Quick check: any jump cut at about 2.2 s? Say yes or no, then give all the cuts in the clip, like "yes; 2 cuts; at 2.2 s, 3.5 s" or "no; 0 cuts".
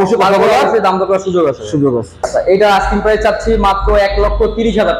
yes; 1 cut; at 2.2 s